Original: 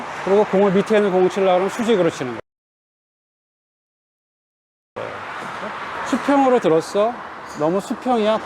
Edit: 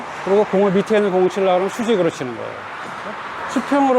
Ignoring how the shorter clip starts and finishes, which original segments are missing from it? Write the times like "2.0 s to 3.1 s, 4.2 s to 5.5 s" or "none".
2.4 s to 5.0 s